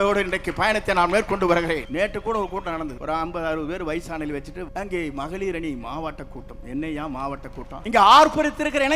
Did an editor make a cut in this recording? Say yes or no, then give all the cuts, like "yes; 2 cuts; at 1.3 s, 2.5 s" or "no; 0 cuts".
yes; 4 cuts; at 1.9 s, 3.0 s, 4.7 s, 7.8 s